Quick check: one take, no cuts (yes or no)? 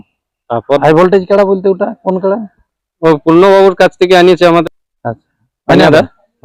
no